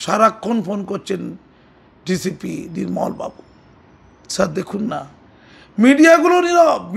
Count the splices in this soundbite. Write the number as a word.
zero